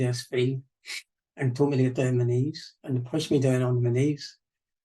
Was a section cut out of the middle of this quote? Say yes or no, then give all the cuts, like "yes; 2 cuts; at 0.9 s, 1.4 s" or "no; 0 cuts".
no; 0 cuts